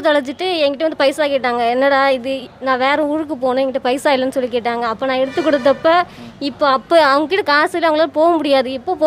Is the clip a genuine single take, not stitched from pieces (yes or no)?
yes